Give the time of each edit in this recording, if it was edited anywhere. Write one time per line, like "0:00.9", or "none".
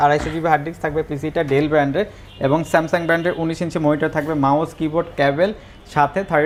none